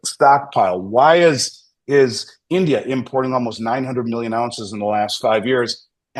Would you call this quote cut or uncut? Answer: uncut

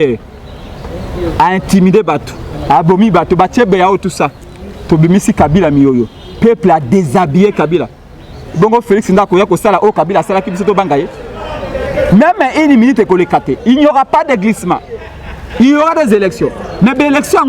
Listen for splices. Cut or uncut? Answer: uncut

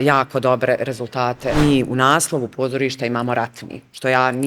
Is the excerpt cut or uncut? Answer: cut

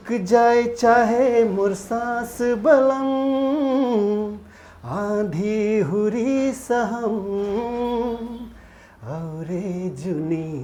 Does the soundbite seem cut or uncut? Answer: uncut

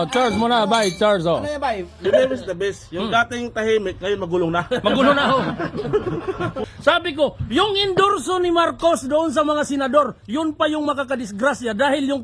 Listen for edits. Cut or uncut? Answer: cut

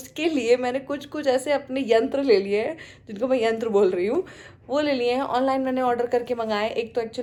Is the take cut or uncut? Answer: uncut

